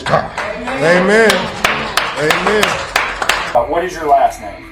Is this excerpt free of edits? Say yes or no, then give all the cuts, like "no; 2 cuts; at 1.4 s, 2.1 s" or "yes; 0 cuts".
no; 1 cut; at 3.6 s